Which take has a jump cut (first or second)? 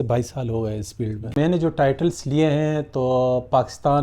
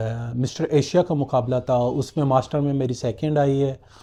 first